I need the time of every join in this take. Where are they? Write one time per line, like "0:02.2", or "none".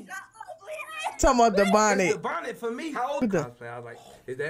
0:03.2